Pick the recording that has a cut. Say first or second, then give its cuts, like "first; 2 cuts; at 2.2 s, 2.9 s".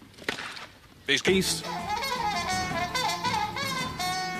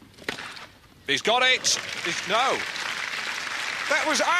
second; 1 cut; at 1.2 s